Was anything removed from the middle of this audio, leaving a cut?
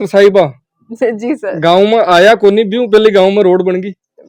no; 0 cuts

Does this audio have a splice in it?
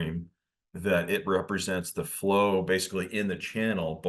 no; 0 cuts

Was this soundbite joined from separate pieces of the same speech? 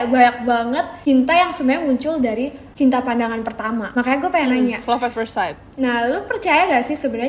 no; 0 cuts

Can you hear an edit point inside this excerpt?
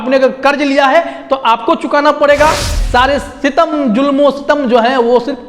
yes; 1 cut; at 2.7 s

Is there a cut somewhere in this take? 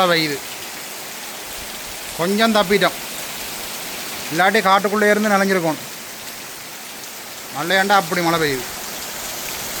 no; 0 cuts

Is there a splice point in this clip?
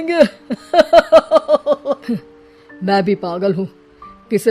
yes; 1 cut; at 2.0 s

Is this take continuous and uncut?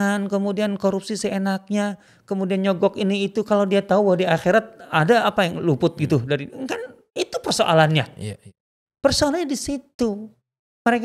no; 1 cut; at 2.1 s

